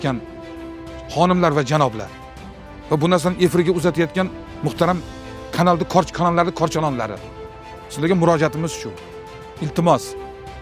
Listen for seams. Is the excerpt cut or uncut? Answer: uncut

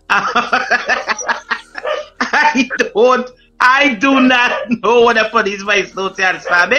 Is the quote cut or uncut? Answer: uncut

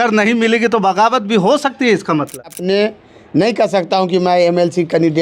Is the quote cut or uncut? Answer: cut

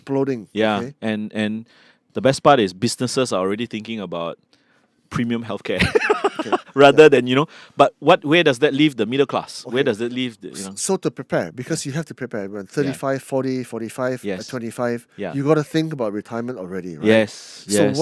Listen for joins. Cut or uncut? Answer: uncut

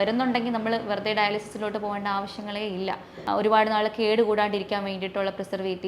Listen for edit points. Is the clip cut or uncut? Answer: cut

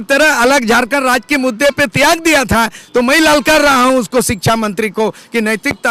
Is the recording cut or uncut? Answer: uncut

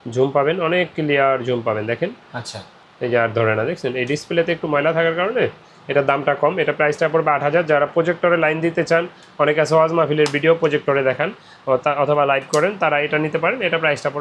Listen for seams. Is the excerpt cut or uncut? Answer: uncut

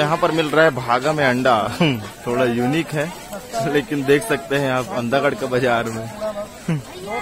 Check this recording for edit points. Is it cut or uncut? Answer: uncut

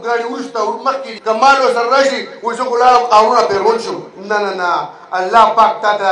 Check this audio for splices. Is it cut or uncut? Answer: cut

